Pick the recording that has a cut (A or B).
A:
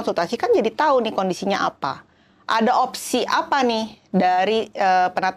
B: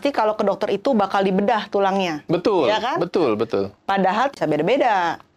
B